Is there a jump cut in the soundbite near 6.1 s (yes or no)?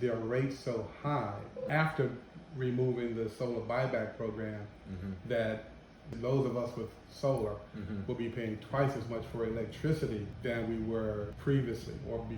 yes